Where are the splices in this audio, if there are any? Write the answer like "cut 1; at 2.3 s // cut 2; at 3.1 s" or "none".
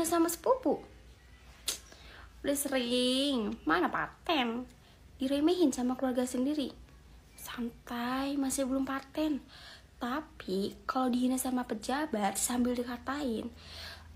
none